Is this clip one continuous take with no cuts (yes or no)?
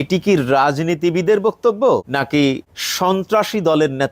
no